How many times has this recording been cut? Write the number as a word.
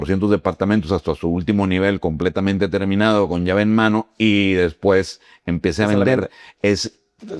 zero